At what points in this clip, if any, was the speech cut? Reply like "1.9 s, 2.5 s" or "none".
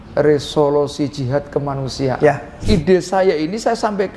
2.5 s